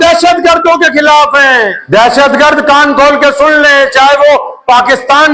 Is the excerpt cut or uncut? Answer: cut